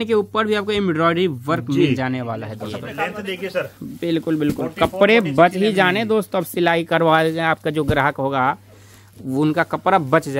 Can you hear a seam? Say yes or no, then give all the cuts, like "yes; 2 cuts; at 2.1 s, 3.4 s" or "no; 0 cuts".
yes; 1 cut; at 2.9 s